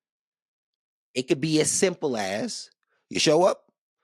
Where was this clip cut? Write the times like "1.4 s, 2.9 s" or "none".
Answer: none